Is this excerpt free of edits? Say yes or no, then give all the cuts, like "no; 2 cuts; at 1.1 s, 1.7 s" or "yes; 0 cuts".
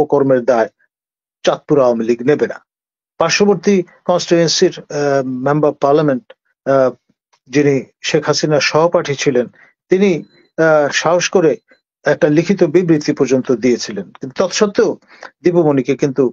yes; 0 cuts